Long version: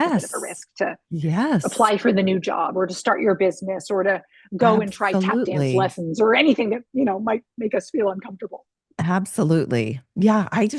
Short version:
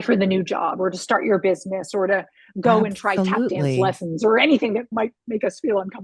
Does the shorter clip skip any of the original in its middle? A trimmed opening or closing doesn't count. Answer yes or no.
yes